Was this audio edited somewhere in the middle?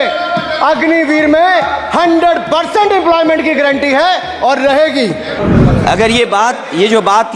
yes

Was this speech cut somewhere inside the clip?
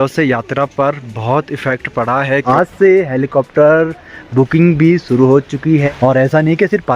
yes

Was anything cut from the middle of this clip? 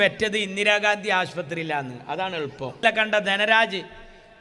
yes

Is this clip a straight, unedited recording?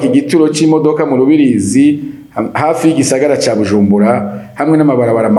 yes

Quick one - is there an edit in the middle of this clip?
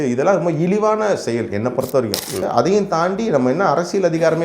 yes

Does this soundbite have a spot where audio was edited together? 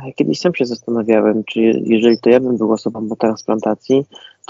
no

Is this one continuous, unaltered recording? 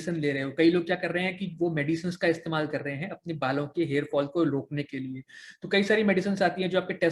yes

